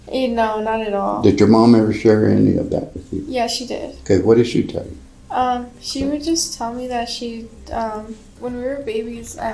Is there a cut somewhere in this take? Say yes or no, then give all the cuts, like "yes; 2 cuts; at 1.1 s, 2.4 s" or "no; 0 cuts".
yes; 1 cut; at 8.4 s